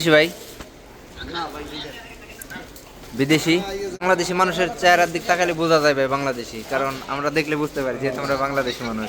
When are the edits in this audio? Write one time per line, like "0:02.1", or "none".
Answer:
0:04.0